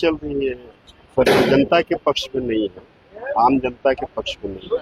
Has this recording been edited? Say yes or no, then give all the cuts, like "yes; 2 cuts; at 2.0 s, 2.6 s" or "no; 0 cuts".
no; 0 cuts